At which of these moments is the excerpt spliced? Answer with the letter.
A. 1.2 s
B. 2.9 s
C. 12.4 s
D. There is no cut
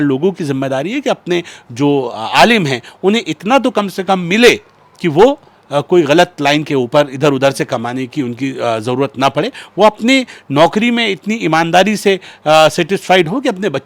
D